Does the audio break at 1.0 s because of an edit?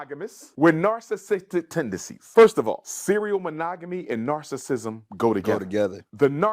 no; 1 cut; at 2.7 s

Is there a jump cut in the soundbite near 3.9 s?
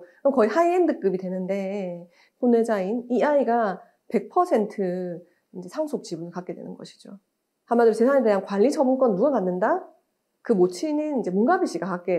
no; 2 cuts; at 2.2 s, 7.3 s

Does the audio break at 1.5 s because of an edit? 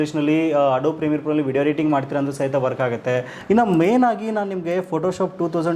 no; 1 cut; at 3.3 s

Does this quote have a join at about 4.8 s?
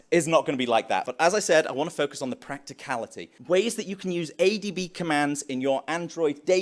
no; 2 cuts; at 1.0 s, 3.3 s

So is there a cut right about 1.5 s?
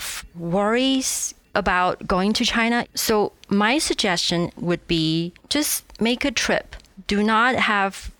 yes; 1 cut; at 1.5 s

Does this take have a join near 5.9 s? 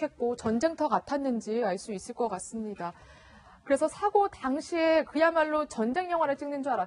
no; 0 cuts

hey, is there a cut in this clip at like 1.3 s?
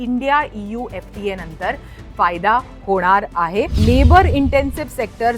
no; 1 cut; at 3.7 s

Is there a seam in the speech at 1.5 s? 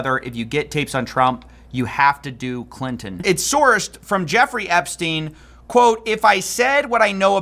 no; 1 cut; at 3.1 s

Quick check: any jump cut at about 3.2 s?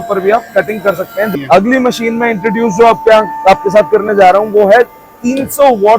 no; 1 cut; at 1.3 s

